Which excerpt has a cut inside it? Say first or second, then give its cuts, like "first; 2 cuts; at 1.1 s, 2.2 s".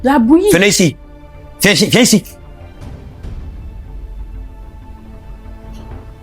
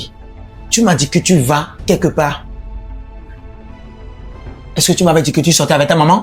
first; 1 cut; at 2.3 s